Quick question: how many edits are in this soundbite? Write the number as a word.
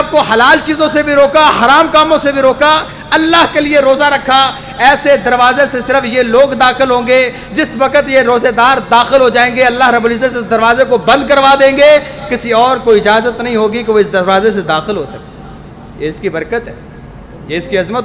zero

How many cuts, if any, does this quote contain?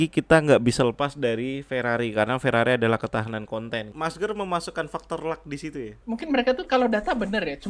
two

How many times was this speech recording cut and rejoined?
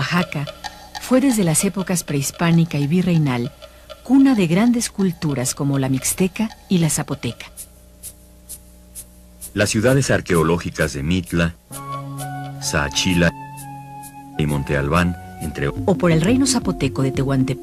zero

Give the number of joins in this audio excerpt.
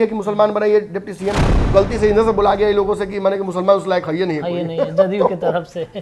one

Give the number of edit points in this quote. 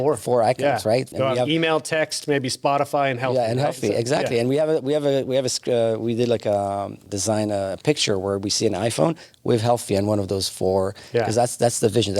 two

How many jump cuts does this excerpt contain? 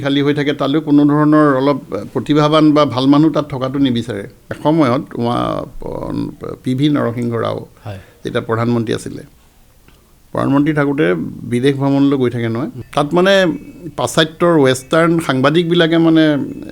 two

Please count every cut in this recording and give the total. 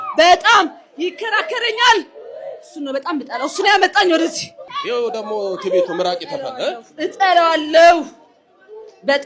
one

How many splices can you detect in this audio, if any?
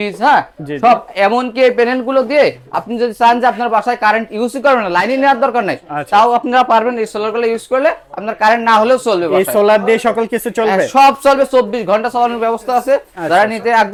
zero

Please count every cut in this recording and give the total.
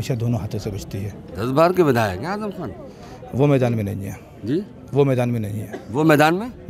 one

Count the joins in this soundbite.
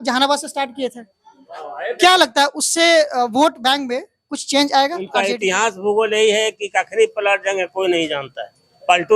one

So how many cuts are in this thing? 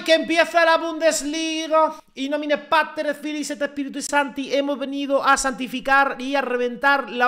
one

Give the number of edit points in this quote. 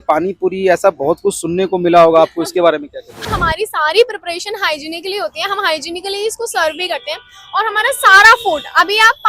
one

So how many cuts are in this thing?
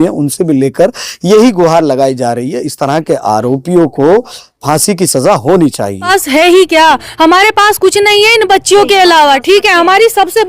one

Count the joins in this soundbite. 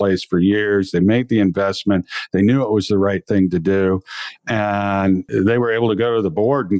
one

